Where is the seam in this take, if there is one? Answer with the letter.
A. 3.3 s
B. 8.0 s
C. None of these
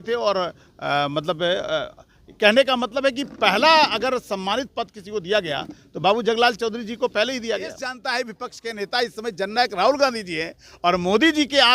B